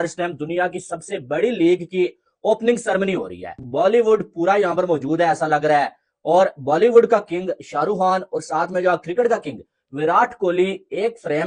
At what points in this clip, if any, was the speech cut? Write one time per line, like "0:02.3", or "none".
none